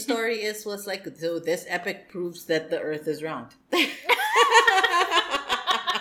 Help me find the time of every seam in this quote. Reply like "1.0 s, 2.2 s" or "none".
3.5 s